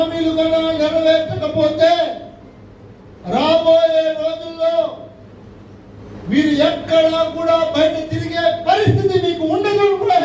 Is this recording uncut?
yes; 0 cuts

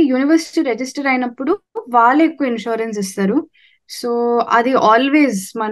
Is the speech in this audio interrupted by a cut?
no; 0 cuts

